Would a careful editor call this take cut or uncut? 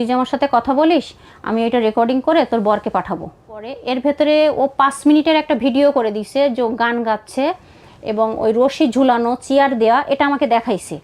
cut